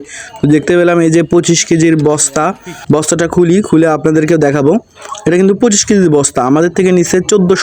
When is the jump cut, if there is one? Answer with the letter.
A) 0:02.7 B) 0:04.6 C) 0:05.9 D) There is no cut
A